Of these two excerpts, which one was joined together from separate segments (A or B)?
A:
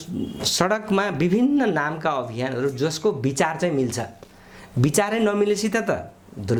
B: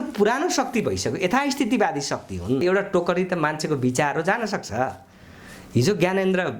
B